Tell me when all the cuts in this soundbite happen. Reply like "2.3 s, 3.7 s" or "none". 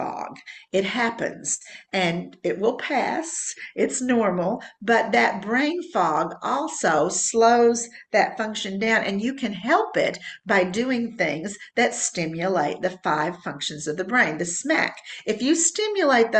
none